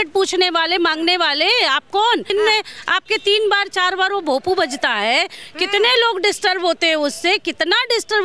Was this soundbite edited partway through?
yes; 1 cut; at 2.3 s

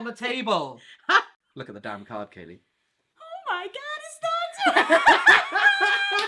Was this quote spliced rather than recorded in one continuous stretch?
yes; 1 cut; at 1.4 s

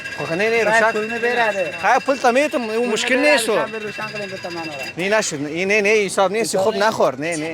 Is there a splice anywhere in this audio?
no; 0 cuts

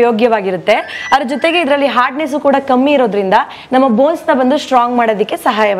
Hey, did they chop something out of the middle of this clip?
no; 0 cuts

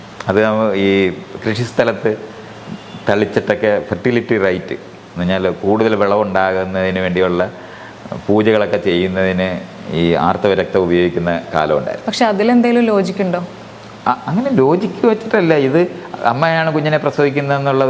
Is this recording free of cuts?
yes; 0 cuts

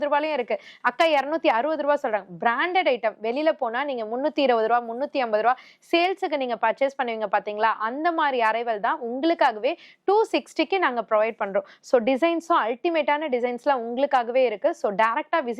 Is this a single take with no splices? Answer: yes; 0 cuts

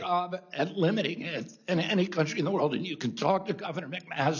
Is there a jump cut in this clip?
no; 0 cuts

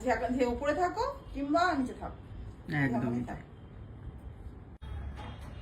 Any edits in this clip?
yes; 1 cut; at 4.7 s

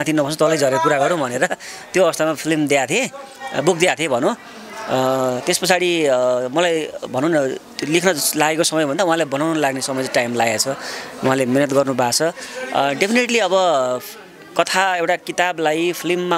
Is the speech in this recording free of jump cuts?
yes; 0 cuts

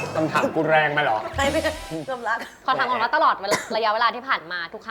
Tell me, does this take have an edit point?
no; 0 cuts

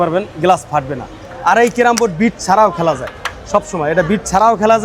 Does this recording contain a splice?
no; 0 cuts

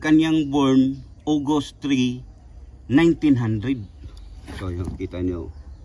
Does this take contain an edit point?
no; 0 cuts

